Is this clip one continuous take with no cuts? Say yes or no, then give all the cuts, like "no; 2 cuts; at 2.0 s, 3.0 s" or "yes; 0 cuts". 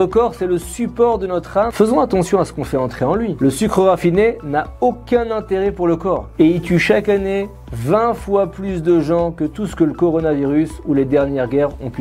no; 3 cuts; at 1.7 s, 3.4 s, 6.3 s